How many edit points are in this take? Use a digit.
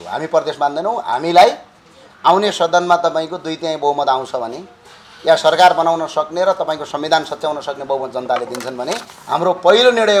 0